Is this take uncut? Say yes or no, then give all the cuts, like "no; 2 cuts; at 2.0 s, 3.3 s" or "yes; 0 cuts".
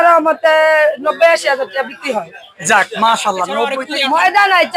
no; 1 cut; at 3.8 s